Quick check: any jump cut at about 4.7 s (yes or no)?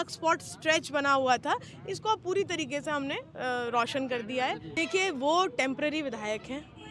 yes